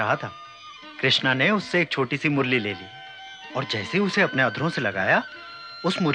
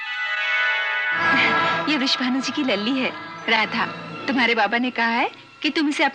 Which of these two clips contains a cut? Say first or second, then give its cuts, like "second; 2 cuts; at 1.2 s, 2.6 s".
second; 2 cuts; at 1.2 s, 4.1 s